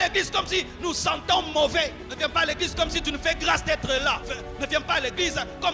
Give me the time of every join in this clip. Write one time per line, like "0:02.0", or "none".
0:02.0
0:04.3